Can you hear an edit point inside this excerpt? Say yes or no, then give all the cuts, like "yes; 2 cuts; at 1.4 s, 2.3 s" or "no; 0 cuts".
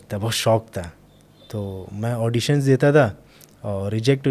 no; 0 cuts